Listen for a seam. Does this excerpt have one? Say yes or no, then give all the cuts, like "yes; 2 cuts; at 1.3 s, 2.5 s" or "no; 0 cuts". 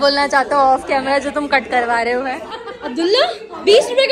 yes; 1 cut; at 2.5 s